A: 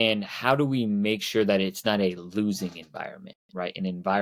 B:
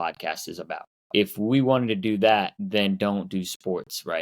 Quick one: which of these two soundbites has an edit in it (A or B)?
B